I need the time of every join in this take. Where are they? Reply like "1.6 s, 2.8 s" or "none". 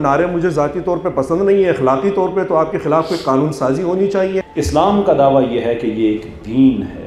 4.5 s